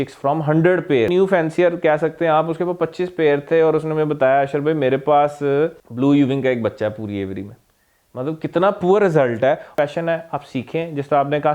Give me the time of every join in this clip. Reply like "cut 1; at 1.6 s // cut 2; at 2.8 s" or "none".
cut 1; at 1.1 s // cut 2; at 5.8 s // cut 3; at 9.7 s

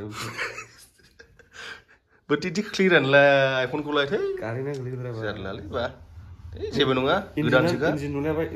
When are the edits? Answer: none

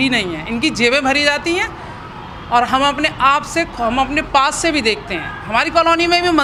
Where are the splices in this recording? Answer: none

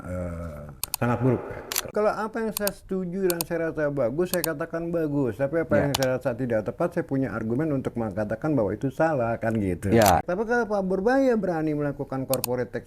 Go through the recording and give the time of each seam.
cut 1; at 1.9 s // cut 2; at 10.2 s

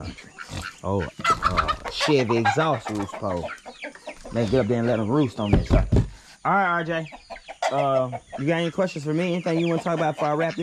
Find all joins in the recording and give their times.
none

